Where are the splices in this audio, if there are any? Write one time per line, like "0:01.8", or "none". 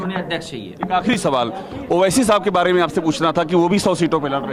none